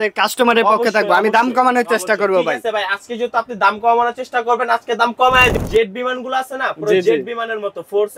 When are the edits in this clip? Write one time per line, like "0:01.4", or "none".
0:05.5

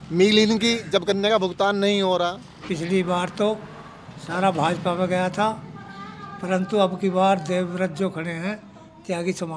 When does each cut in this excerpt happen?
0:02.6

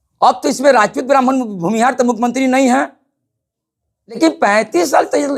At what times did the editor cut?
0:04.2

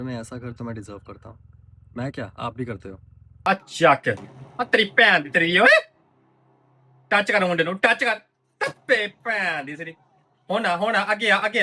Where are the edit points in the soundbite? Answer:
0:03.5

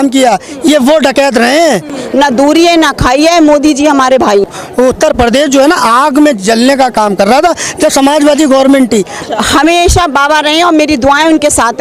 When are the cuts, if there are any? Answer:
0:01.9
0:04.4
0:09.2

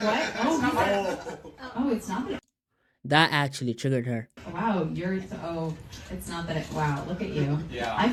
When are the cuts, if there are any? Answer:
none

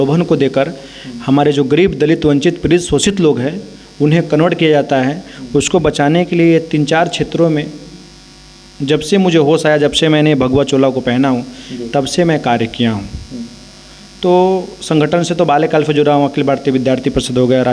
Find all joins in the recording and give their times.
none

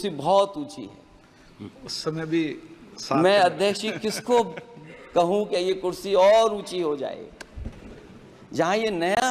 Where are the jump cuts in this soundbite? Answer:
none

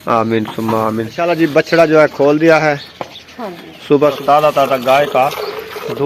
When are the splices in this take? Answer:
0:01.2
0:04.2

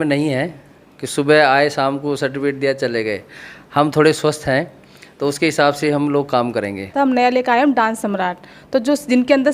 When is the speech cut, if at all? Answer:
0:06.9

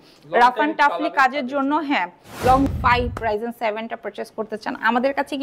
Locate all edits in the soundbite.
0:02.7

